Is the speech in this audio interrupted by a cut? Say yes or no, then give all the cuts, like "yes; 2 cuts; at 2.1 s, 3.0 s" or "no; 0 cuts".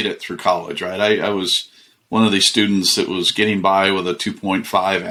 no; 0 cuts